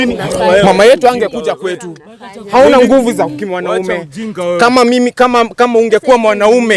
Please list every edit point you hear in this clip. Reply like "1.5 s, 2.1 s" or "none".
none

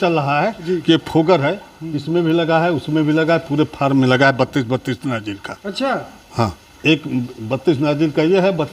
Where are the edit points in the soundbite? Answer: none

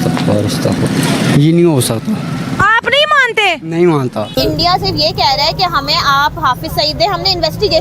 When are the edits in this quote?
4.4 s

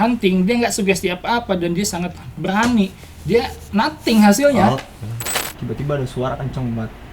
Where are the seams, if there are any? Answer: 5.4 s

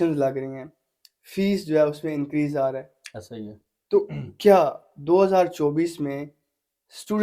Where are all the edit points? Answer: none

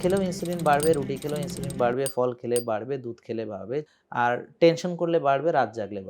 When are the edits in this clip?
4.0 s

